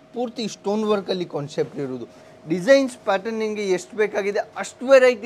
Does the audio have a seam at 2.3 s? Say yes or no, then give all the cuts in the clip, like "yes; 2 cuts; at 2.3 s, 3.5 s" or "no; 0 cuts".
yes; 1 cut; at 2.3 s